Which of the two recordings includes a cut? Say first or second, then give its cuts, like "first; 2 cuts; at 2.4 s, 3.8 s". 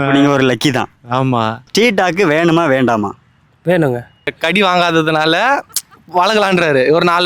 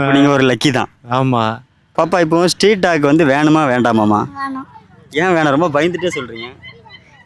first; 2 cuts; at 1.7 s, 4.2 s